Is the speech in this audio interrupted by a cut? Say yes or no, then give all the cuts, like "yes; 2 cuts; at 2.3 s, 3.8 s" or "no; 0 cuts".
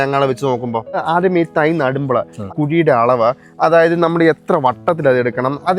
yes; 2 cuts; at 1.0 s, 2.5 s